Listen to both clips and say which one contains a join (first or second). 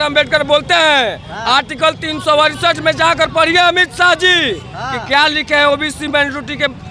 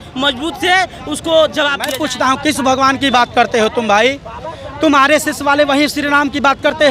second